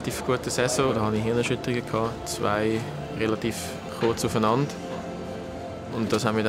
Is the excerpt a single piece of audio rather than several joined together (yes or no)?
no